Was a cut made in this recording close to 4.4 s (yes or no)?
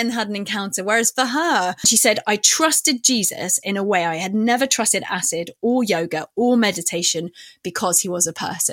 no